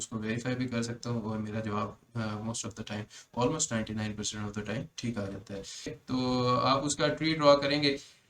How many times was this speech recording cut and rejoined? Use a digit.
1